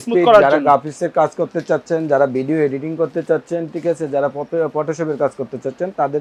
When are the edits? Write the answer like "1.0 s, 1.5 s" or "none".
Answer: none